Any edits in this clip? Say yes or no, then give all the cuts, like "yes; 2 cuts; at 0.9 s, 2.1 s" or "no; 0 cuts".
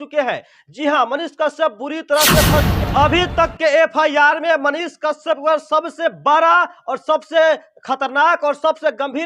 yes; 1 cut; at 2.8 s